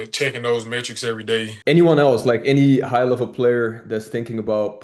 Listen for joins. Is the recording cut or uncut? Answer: cut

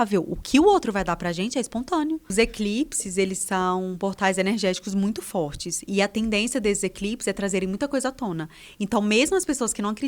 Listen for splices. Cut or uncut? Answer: cut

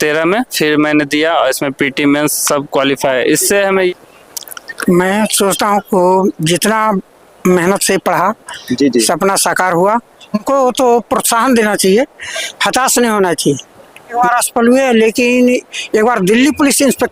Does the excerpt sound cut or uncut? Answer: cut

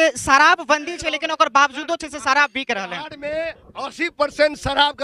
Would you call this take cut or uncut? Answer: uncut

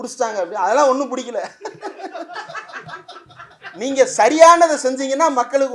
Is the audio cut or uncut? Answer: uncut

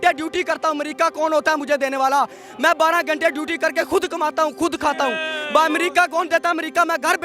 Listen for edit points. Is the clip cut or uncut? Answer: uncut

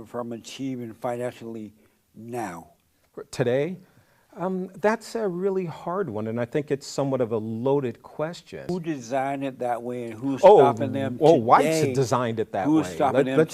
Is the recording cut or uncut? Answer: cut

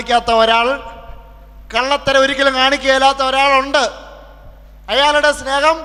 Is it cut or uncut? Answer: uncut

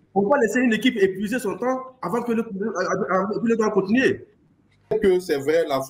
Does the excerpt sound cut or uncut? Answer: cut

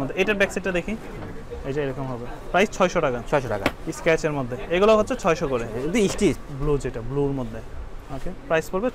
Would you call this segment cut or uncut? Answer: cut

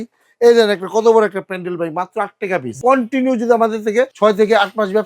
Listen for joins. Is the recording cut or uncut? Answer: cut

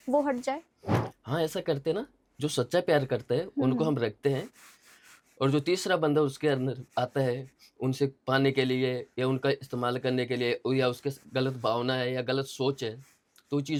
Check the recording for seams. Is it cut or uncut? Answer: uncut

